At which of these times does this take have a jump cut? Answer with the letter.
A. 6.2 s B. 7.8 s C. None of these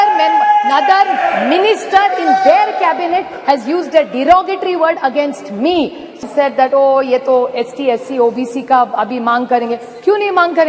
A